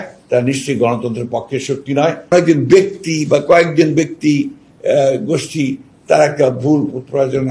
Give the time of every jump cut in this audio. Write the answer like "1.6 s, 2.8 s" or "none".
2.3 s